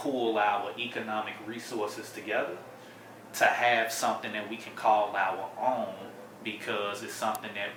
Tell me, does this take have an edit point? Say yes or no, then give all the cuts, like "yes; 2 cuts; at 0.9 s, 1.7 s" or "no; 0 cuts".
no; 0 cuts